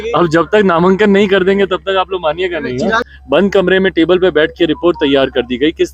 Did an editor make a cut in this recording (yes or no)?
yes